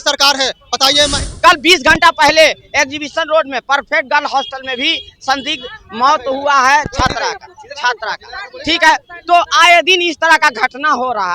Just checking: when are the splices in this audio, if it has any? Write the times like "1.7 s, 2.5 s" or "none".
1.3 s